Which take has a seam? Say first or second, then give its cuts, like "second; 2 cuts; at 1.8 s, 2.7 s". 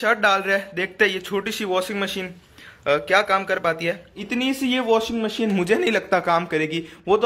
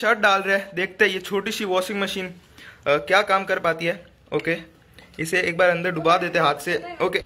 first; 1 cut; at 4.2 s